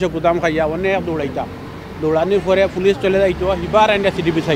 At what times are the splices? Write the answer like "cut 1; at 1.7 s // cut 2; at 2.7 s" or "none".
none